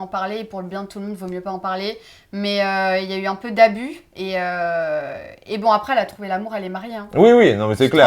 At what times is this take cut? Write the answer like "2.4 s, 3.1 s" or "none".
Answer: none